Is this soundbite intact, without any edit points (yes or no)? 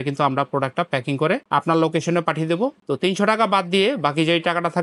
yes